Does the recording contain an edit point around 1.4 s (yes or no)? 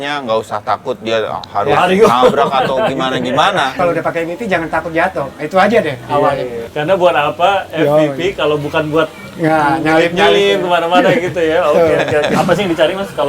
no